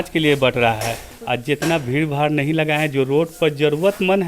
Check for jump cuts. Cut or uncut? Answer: cut